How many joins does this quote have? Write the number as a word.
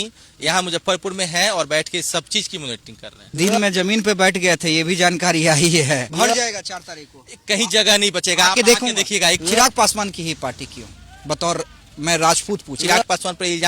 three